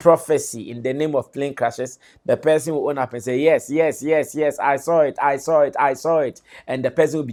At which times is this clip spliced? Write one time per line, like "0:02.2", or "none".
none